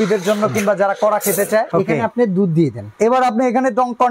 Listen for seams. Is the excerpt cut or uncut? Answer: cut